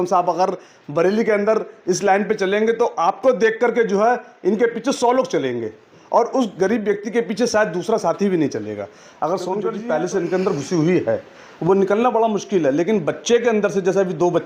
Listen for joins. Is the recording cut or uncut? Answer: cut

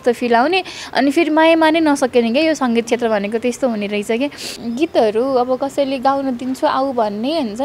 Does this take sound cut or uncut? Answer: cut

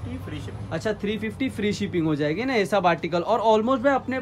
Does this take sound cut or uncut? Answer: uncut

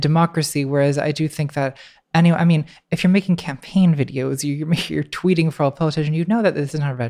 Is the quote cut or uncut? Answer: uncut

